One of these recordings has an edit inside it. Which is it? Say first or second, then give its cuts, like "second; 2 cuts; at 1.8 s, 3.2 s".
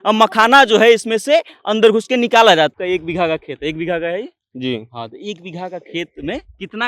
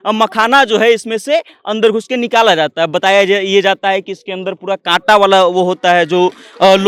first; 1 cut; at 2.7 s